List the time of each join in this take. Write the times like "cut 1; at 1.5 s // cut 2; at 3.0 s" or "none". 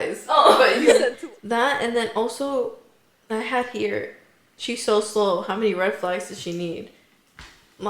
cut 1; at 1.0 s